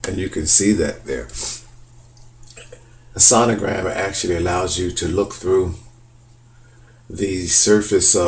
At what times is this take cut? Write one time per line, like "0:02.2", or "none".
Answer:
0:01.6